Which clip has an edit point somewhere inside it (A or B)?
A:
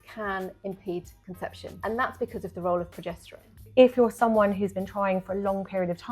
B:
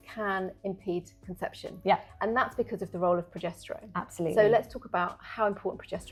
A